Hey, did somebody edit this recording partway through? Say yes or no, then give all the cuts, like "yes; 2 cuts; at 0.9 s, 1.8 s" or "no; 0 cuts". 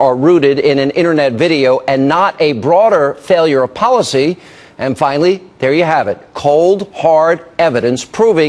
yes; 1 cut; at 6.0 s